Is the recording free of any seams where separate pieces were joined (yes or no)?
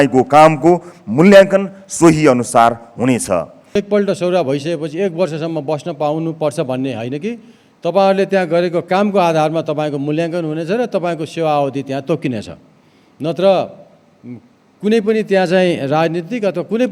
no